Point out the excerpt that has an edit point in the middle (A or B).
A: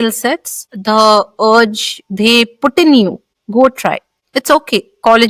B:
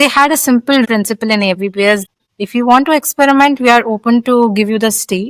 B